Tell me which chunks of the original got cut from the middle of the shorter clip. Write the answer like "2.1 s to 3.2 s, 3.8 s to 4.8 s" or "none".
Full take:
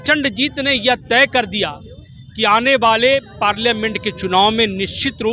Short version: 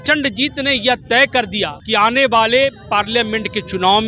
1.8 s to 2.3 s